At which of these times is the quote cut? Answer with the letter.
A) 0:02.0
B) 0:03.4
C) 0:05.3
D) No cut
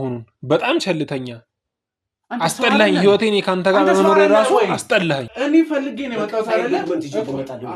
C